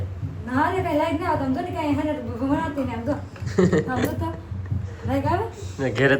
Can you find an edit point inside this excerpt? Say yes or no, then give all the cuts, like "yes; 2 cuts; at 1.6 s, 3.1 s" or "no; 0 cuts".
no; 0 cuts